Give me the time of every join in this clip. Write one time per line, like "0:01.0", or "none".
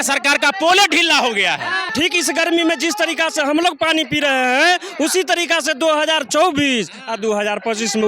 0:01.9